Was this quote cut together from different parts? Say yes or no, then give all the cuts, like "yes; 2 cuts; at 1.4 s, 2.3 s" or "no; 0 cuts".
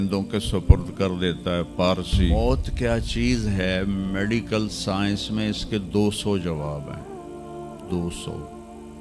yes; 1 cut; at 2.3 s